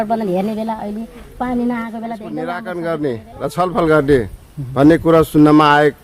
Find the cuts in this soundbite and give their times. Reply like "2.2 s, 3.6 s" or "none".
2.5 s